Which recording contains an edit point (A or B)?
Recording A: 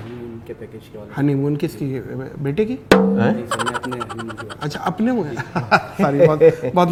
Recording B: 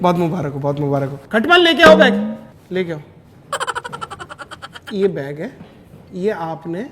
B